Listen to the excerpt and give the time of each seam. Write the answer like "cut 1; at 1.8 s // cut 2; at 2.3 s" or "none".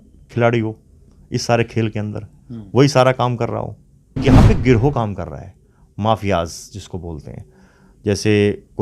cut 1; at 4.2 s